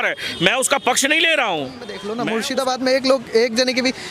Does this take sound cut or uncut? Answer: cut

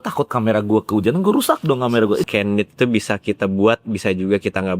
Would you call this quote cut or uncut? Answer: cut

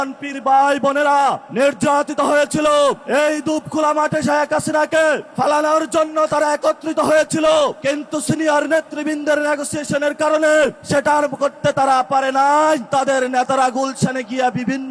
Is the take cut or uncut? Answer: cut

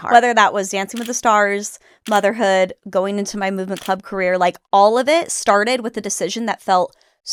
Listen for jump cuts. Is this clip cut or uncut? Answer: uncut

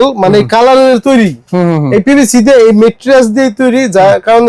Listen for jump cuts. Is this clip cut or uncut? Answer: uncut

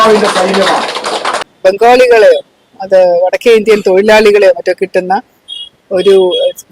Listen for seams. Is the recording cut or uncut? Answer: cut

